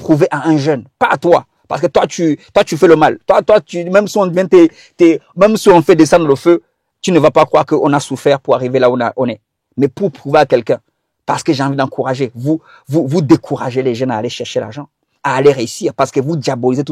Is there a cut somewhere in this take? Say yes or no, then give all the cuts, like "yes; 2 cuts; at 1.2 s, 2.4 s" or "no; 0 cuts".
no; 0 cuts